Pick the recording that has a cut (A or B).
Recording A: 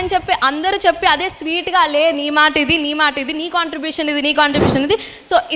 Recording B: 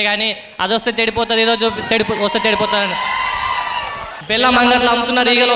B